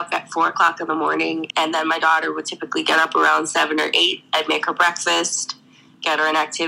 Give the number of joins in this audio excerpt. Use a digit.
1